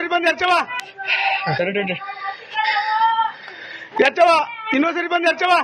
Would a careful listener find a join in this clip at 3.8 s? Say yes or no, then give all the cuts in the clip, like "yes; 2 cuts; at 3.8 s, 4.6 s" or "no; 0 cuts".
no; 1 cut; at 2.0 s